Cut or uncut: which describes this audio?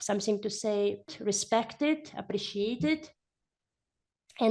cut